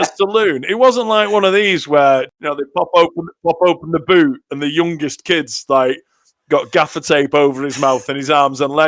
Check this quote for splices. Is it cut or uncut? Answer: cut